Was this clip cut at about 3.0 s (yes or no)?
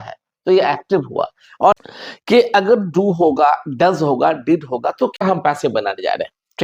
no